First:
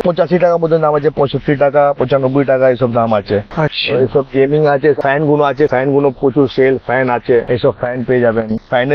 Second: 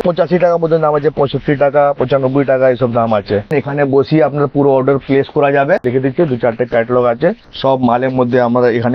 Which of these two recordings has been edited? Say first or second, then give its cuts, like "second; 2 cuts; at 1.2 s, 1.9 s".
second; 3 cuts; at 3.5 s, 5.8 s, 7.5 s